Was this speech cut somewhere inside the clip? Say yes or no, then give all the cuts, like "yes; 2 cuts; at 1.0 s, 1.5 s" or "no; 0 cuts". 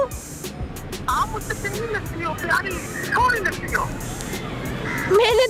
no; 0 cuts